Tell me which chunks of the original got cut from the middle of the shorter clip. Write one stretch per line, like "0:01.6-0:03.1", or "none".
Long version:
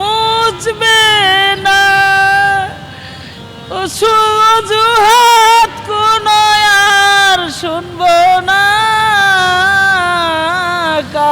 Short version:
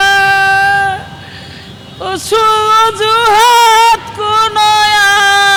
none